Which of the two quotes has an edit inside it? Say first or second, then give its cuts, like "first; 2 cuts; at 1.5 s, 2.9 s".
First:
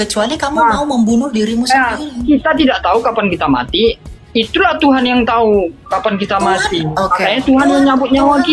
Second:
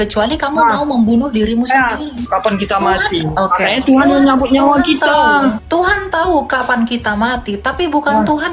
second; 2 cuts; at 2.2 s, 5.6 s